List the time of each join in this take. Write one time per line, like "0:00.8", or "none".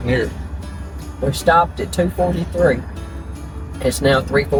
none